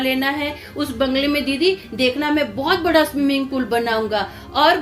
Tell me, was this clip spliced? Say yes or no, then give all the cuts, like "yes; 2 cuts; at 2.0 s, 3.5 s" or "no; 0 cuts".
no; 0 cuts